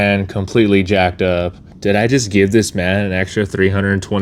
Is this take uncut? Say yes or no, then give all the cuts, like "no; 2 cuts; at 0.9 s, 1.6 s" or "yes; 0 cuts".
no; 1 cut; at 1.6 s